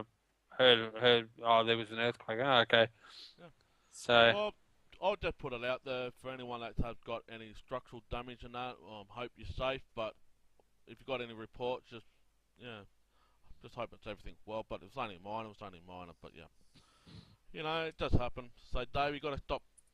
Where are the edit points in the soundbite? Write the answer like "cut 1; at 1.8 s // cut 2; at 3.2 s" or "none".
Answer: none